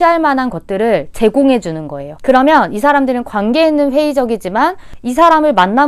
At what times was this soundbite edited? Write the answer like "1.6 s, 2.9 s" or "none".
none